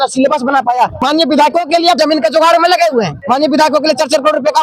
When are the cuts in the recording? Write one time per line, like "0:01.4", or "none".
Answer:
0:01.0
0:02.0
0:03.2